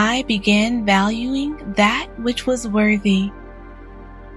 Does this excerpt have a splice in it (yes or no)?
yes